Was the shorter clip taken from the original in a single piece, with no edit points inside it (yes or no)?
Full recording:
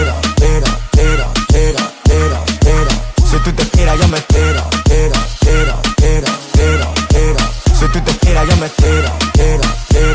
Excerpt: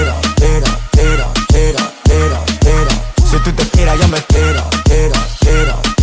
yes